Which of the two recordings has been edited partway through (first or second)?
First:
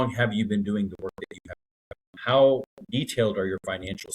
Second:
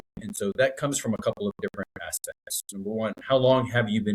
first